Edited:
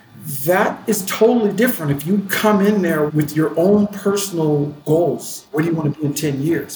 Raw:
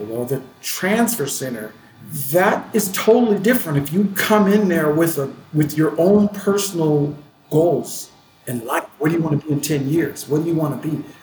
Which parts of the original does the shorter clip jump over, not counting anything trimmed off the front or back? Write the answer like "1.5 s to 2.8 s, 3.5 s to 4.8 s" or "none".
4.9 s to 5.5 s, 7.2 s to 7.4 s, 8.1 s to 8.9 s